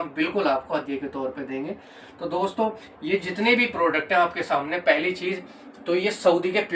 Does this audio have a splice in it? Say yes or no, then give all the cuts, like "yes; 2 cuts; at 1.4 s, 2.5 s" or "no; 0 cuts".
no; 0 cuts